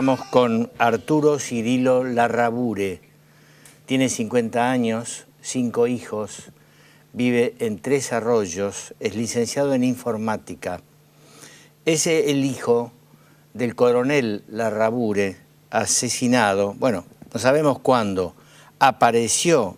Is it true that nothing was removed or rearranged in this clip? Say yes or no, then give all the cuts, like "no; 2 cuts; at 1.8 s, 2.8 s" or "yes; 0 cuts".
yes; 0 cuts